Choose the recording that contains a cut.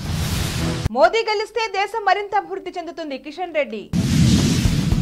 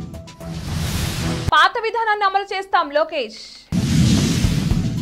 second; 1 cut; at 1.5 s

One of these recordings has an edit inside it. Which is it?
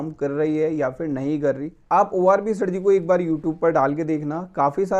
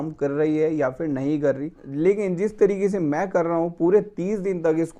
second; 1 cut; at 1.7 s

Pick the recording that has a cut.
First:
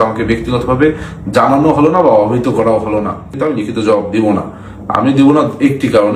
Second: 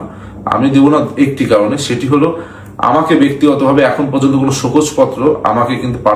first; 1 cut; at 3.4 s

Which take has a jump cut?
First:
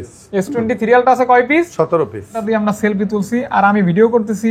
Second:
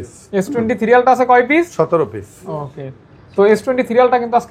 first; 1 cut; at 2.4 s

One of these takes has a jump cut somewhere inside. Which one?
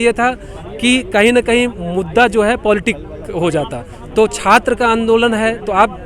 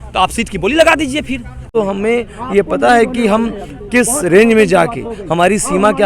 second; 1 cut; at 1.6 s

